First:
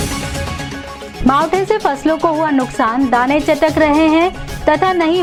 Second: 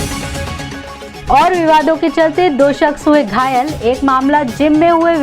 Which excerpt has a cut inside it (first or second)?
second